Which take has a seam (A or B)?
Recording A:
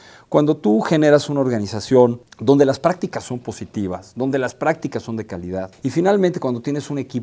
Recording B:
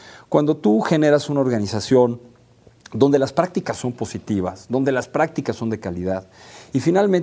A